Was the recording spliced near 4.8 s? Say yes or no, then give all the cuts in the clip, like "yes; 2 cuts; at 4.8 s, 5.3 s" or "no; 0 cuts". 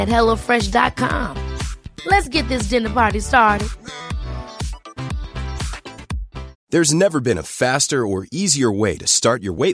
no; 1 cut; at 6.6 s